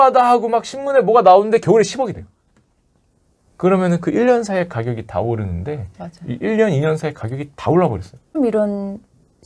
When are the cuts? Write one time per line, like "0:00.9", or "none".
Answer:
0:08.3